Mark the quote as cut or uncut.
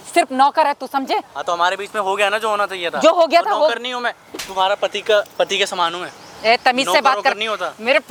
uncut